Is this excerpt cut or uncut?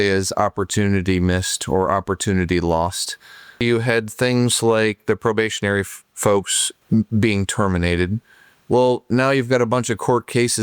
cut